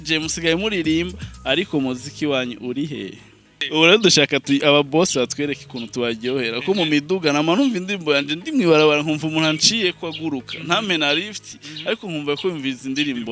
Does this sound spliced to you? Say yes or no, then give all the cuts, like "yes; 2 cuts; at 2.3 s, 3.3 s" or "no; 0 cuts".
yes; 1 cut; at 3.5 s